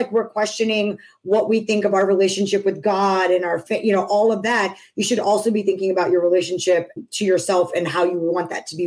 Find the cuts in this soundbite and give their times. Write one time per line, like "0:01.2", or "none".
0:06.9